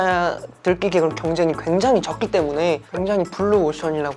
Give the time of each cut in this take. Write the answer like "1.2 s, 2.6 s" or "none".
2.9 s